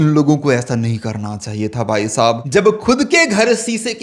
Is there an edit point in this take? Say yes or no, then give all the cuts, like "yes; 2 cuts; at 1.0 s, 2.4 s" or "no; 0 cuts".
yes; 1 cut; at 2.4 s